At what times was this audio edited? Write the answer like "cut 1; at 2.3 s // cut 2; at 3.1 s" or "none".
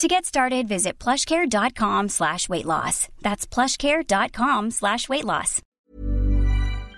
cut 1; at 5.9 s